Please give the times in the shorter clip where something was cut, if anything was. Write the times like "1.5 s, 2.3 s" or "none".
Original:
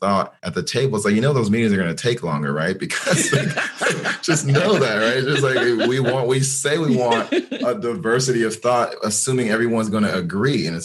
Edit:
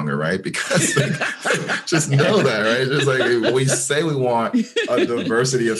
3.5 s